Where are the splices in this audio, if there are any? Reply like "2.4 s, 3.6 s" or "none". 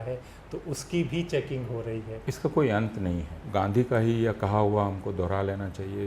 2.1 s, 3.3 s